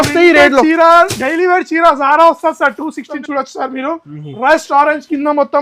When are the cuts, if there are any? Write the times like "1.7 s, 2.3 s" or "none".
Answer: 3.1 s